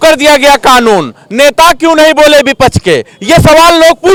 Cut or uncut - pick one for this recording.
uncut